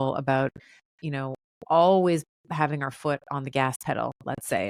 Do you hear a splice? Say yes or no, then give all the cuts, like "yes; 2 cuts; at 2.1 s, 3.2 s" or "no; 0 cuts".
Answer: no; 0 cuts